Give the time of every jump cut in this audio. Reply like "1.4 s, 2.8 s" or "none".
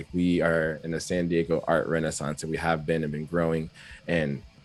none